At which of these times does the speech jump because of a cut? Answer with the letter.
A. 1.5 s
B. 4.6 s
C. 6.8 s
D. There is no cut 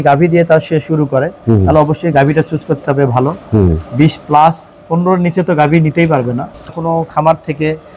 C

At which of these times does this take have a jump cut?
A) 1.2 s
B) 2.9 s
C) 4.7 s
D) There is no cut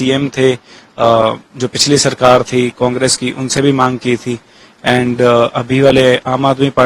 D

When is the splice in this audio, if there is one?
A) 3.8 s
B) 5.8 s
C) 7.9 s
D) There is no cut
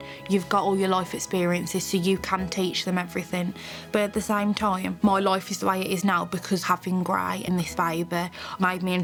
D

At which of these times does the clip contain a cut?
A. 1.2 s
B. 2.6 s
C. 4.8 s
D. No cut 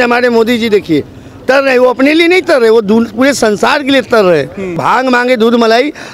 C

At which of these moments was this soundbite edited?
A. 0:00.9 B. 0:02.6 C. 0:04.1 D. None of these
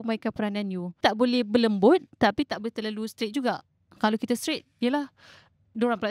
A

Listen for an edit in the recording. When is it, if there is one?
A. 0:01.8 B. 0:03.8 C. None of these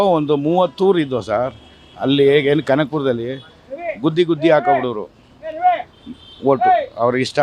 C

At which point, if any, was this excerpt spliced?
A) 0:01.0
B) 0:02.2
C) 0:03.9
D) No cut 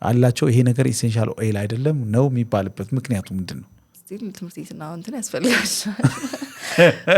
C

